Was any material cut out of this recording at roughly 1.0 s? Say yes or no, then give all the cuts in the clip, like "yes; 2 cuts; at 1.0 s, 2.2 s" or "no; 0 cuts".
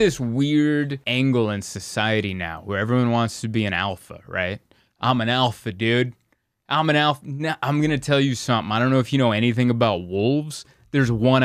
yes; 1 cut; at 1.0 s